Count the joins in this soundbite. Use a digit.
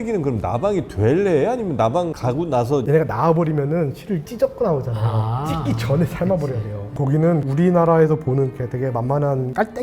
2